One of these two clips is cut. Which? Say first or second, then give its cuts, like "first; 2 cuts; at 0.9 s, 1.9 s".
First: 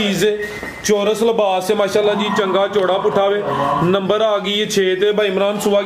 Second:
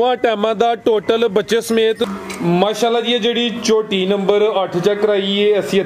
second; 1 cut; at 2.1 s